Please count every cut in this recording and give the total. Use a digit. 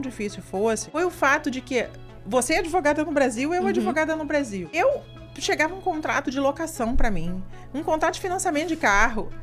2